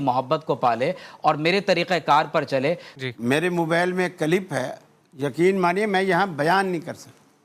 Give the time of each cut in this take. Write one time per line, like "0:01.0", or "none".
0:02.9